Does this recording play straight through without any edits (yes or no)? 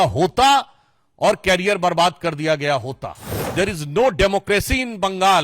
no